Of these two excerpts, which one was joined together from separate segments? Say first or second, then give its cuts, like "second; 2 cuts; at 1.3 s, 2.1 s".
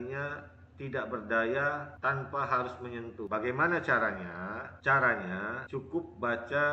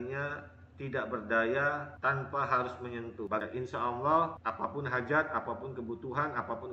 second; 1 cut; at 3.4 s